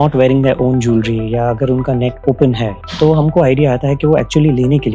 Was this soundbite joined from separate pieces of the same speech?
yes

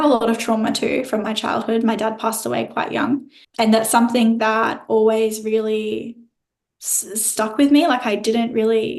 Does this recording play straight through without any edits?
no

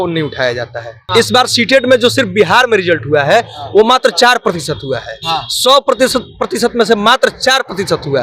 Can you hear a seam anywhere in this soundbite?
yes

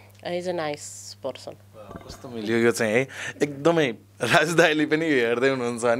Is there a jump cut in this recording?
no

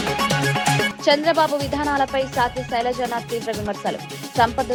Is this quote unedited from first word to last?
yes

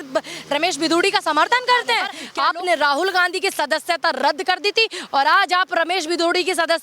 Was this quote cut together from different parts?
yes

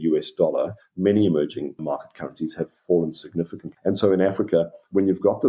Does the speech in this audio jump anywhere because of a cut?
yes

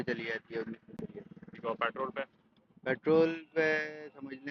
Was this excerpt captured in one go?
yes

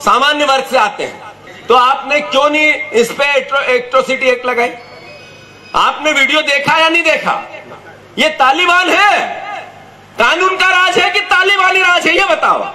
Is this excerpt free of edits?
no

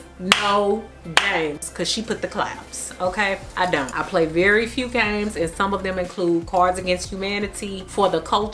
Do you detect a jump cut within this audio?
no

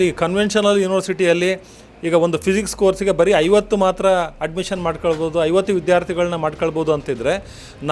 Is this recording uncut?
yes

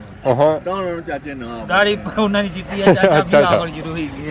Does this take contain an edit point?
no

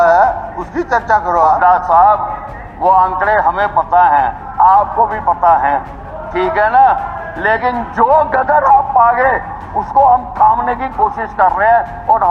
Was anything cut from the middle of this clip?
no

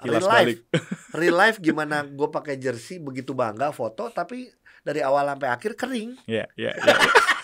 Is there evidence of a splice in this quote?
no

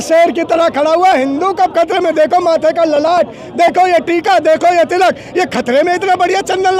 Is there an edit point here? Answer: no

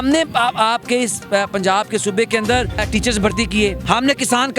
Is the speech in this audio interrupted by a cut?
yes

